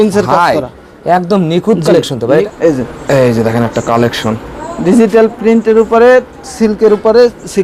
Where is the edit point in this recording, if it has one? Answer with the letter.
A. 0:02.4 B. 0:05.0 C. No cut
A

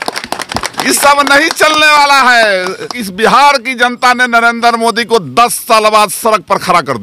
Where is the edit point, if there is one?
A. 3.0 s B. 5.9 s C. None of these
A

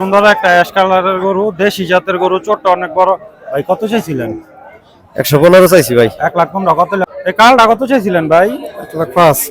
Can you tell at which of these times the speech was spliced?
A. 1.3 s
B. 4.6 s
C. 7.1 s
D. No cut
C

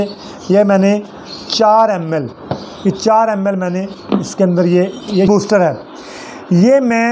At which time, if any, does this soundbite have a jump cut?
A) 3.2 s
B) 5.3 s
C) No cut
B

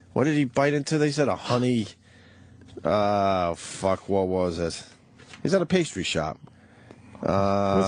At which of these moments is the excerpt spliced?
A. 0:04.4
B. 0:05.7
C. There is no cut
C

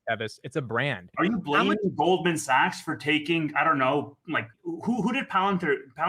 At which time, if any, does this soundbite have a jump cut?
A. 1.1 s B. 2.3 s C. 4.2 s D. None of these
D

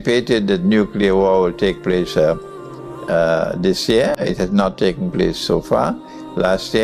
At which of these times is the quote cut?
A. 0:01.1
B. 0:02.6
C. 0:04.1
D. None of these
D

